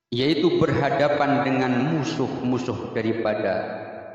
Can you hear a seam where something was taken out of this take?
no; 0 cuts

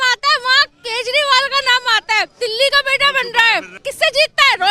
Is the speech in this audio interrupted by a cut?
yes; 2 cuts; at 2.3 s, 3.8 s

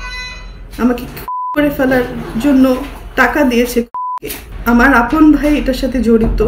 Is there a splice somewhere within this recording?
no; 0 cuts

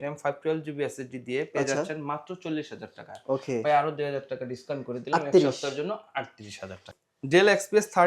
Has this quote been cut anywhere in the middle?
yes; 1 cut; at 6.8 s

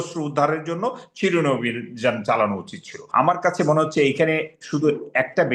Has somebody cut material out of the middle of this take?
yes; 1 cut; at 2.9 s

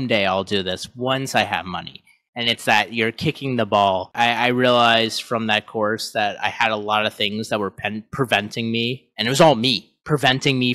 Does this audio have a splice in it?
yes; 1 cut; at 4.1 s

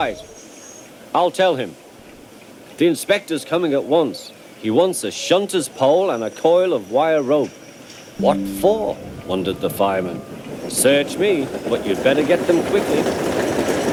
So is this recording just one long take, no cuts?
yes; 0 cuts

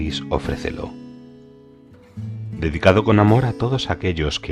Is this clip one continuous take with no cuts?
no; 2 cuts; at 0.9 s, 2.6 s

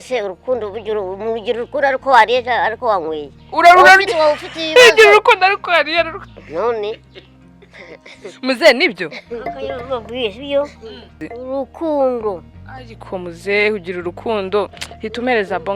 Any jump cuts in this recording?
yes; 1 cut; at 11.3 s

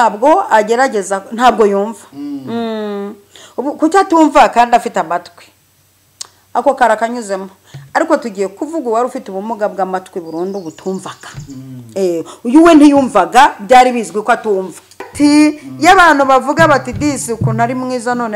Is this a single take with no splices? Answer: no; 1 cut; at 15.1 s

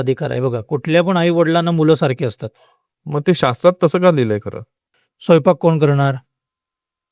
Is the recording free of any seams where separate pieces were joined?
no; 1 cut; at 5.0 s

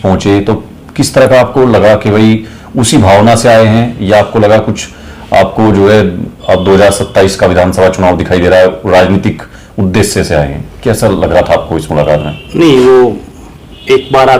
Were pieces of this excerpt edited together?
no; 0 cuts

